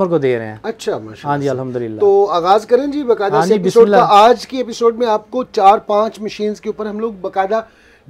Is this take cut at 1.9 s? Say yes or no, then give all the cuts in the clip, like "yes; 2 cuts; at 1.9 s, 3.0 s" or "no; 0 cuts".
no; 0 cuts